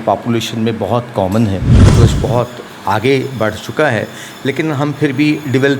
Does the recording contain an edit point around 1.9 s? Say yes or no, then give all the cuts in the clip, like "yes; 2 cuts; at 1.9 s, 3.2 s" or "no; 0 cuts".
yes; 1 cut; at 1.9 s